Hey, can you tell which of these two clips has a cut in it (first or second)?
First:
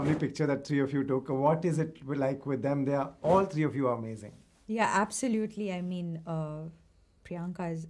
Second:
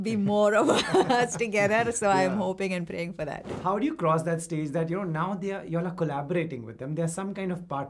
second